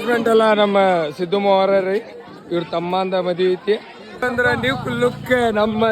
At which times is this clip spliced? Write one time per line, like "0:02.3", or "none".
0:04.2